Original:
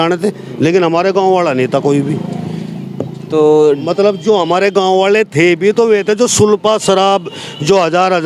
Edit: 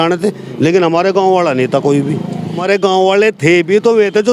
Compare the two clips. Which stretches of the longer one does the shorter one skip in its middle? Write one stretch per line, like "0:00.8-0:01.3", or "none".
0:02.6-0:04.5